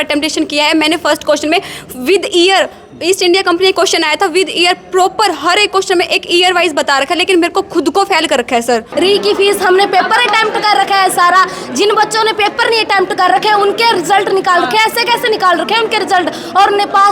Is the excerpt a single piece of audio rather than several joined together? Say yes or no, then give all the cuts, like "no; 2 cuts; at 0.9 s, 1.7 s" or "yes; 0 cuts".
no; 1 cut; at 8.9 s